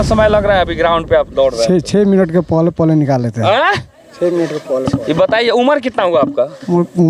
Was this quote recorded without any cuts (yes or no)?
yes